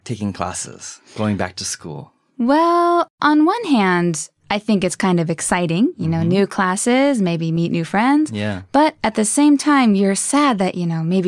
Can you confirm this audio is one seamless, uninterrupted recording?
yes; 0 cuts

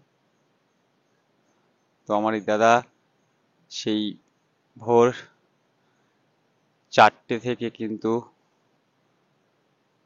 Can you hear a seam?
no; 0 cuts

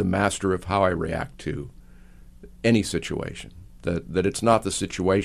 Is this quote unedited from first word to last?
yes; 0 cuts

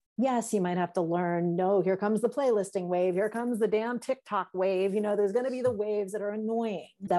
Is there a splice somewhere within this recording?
no; 0 cuts

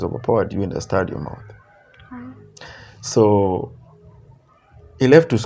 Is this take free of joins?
yes; 0 cuts

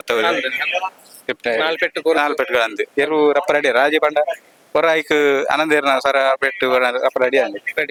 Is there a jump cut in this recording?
no; 0 cuts

